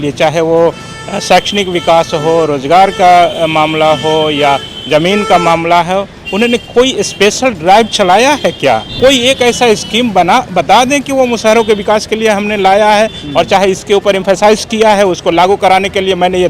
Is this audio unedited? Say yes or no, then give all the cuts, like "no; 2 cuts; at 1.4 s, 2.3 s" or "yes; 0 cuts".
no; 1 cut; at 8.9 s